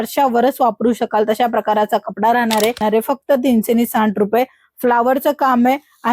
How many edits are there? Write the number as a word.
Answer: one